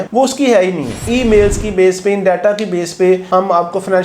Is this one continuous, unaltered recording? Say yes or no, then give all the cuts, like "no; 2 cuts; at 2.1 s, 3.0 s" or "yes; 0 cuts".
no; 1 cut; at 1.0 s